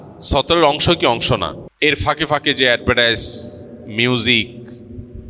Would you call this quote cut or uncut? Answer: cut